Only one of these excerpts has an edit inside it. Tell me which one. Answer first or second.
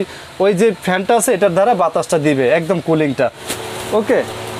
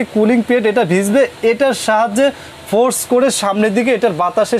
first